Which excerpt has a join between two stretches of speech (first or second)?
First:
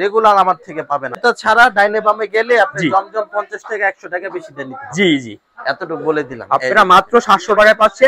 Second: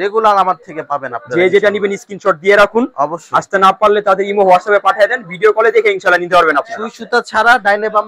first